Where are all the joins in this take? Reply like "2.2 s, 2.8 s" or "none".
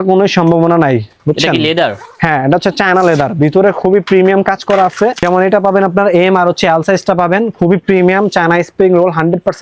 5.2 s